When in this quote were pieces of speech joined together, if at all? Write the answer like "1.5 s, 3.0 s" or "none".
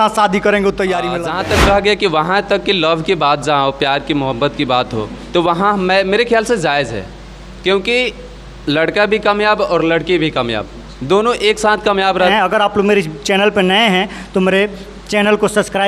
1.1 s, 12.3 s